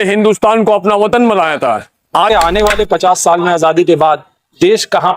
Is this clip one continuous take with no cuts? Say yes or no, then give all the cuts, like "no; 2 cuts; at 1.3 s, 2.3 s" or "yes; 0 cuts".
no; 1 cut; at 2.3 s